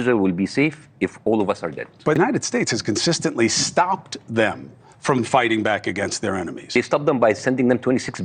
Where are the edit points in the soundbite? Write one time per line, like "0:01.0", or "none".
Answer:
0:02.2
0:06.7